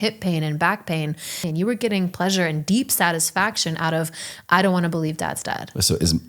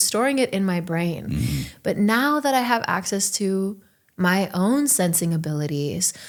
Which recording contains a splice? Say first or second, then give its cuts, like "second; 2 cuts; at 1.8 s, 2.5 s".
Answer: first; 1 cut; at 1.5 s